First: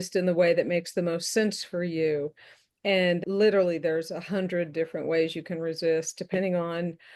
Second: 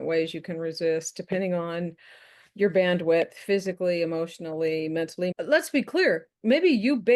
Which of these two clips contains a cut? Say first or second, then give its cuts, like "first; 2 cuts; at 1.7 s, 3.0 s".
second; 1 cut; at 5.3 s